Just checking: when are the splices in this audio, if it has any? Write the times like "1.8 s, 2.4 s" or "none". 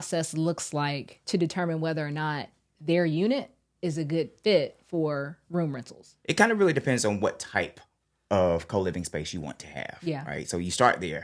1.2 s, 6.1 s